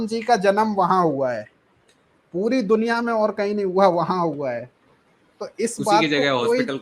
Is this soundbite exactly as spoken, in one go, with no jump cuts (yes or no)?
yes